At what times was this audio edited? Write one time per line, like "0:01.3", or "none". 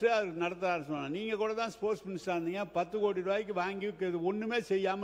none